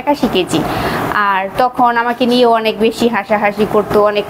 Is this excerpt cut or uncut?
uncut